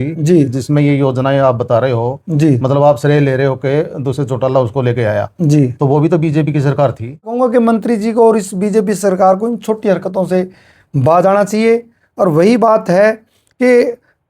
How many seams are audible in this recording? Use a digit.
1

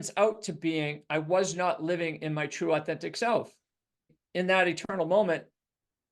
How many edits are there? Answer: 1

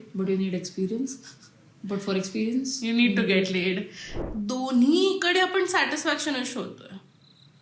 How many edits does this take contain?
1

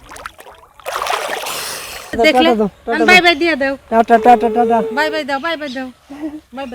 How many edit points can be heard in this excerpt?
1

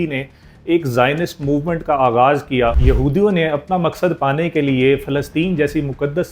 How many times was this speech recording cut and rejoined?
1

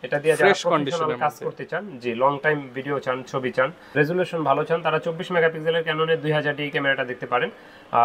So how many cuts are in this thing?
1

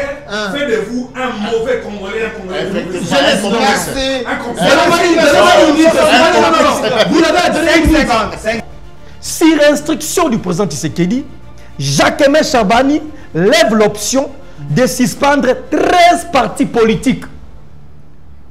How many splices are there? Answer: 1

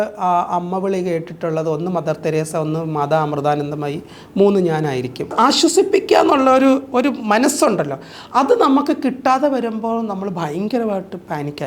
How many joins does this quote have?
1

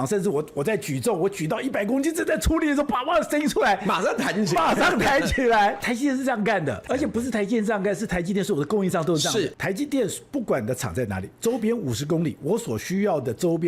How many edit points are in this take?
3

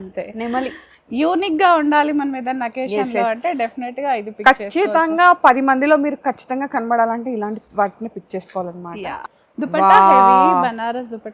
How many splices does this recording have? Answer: 1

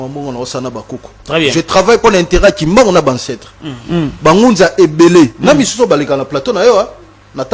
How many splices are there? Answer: 1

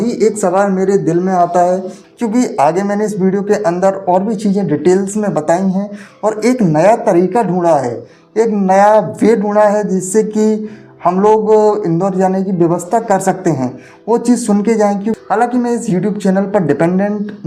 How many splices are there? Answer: 2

